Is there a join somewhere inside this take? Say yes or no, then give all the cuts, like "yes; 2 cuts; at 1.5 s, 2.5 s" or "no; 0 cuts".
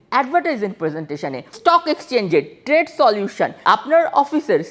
yes; 2 cuts; at 1.6 s, 3.6 s